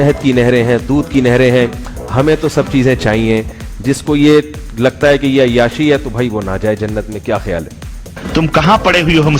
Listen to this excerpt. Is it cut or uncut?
uncut